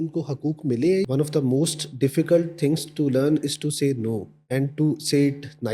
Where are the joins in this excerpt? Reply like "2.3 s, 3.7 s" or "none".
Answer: 1.1 s, 4.3 s